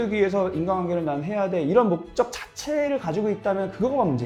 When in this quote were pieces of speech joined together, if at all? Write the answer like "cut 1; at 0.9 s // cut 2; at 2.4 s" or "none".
cut 1; at 2.9 s